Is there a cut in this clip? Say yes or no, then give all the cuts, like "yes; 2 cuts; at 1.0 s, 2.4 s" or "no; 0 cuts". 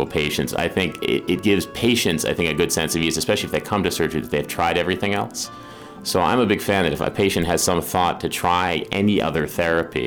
no; 0 cuts